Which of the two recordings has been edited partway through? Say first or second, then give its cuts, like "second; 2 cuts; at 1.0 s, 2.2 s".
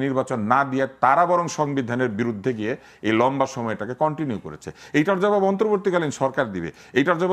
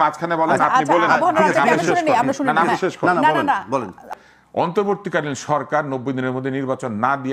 second; 1 cut; at 4.1 s